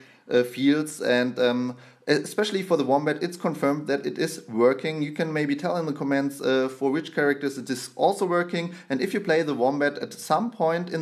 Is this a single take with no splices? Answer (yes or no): no